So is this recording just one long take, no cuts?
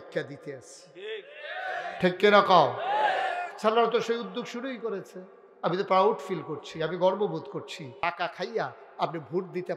no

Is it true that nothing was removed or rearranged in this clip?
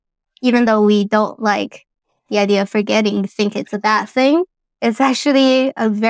yes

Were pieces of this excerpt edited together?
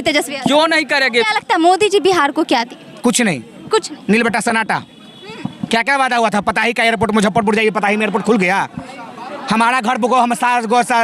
yes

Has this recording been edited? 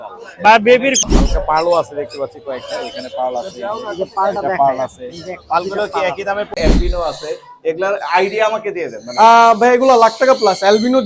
yes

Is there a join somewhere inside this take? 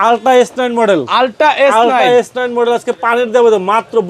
no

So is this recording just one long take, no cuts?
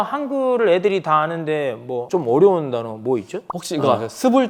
yes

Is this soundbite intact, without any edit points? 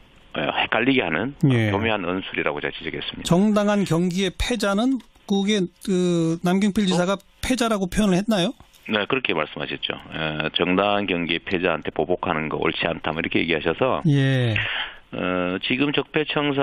no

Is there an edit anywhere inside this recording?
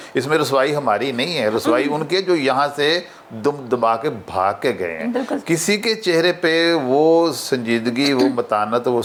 no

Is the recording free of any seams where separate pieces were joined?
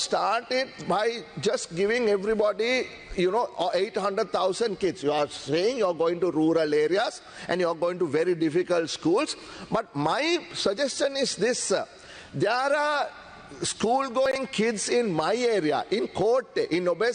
yes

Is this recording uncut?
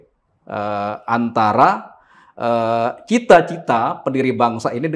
yes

